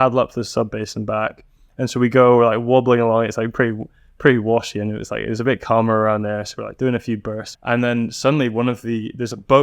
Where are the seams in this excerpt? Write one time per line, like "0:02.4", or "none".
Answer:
0:07.5